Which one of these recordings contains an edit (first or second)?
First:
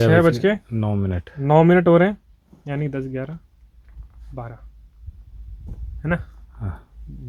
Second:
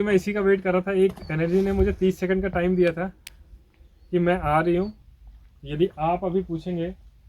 second